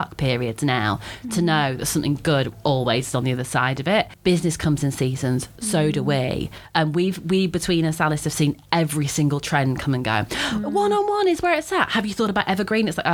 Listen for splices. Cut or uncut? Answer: uncut